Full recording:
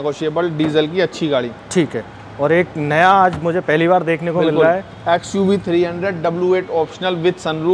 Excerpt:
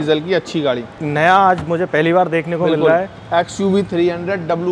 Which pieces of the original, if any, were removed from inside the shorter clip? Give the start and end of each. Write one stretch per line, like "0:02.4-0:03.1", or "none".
0:01.6-0:02.7